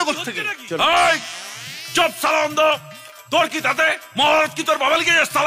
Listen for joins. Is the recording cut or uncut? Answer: uncut